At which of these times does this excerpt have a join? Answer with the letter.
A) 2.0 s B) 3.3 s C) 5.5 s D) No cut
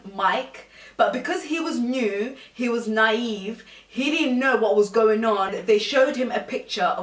C